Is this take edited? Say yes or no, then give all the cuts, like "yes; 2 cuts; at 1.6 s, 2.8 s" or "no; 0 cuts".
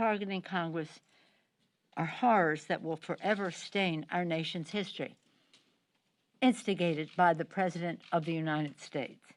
no; 0 cuts